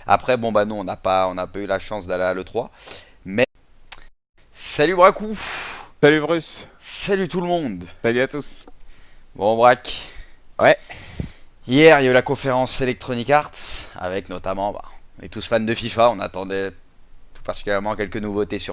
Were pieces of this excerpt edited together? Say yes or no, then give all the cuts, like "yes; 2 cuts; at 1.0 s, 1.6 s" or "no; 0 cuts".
no; 0 cuts